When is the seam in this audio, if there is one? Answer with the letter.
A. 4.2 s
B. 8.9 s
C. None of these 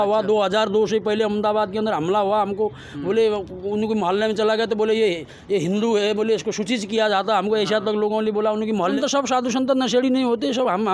B